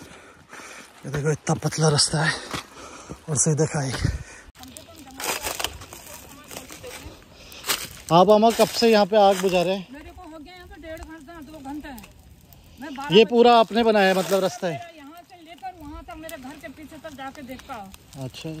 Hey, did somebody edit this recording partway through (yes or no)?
yes